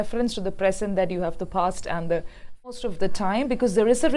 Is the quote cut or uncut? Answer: cut